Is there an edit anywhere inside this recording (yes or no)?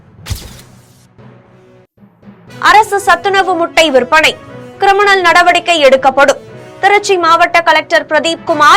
no